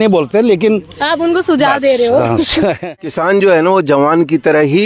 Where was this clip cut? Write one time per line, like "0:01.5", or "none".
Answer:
0:03.0